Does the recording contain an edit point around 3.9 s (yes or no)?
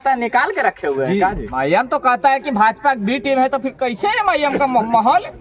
no